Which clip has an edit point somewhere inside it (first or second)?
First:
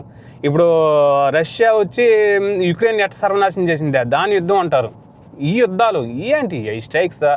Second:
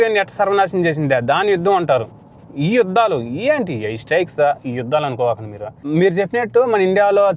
second